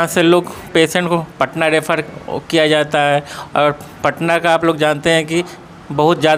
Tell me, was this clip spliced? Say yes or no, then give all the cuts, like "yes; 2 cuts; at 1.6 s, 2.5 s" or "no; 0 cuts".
no; 0 cuts